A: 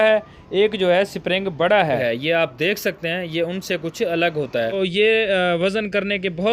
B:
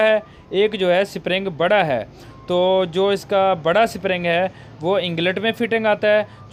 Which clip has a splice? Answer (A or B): A